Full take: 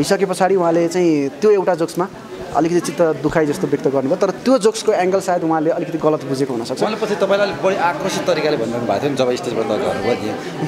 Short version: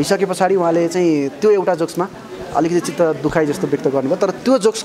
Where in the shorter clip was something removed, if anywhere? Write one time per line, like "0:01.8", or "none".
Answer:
none